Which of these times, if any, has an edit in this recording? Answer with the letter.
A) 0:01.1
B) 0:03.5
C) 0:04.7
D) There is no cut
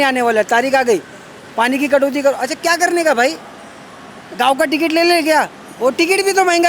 D